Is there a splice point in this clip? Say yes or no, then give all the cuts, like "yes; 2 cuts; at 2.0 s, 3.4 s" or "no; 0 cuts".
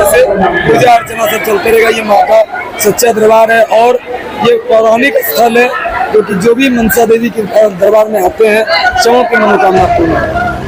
no; 0 cuts